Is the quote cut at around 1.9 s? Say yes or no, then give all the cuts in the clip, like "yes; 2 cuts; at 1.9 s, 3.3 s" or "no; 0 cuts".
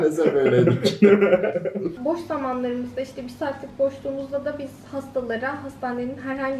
yes; 1 cut; at 1.9 s